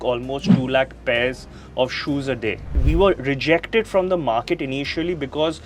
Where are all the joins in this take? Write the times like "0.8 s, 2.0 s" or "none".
2.8 s